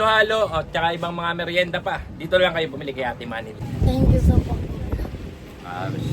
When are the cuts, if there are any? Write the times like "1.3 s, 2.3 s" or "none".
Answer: 3.6 s